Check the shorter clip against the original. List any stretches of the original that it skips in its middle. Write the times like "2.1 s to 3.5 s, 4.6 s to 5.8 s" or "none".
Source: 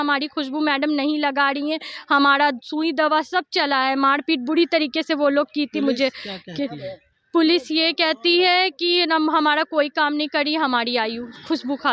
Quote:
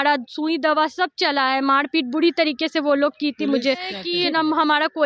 6.3 s to 8.8 s